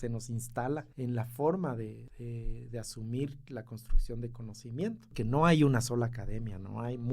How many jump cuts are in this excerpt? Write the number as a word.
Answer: three